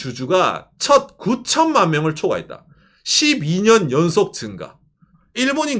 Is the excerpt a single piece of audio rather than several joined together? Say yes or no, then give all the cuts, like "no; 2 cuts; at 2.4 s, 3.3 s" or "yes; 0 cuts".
yes; 0 cuts